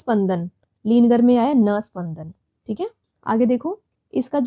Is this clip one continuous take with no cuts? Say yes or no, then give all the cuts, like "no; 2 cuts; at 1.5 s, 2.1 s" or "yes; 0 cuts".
yes; 0 cuts